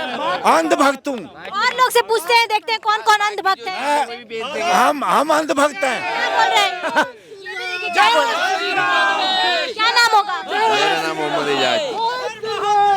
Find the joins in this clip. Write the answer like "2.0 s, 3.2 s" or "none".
none